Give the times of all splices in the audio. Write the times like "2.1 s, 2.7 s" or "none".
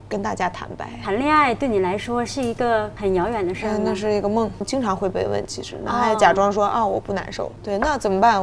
0.9 s, 2.9 s, 4.6 s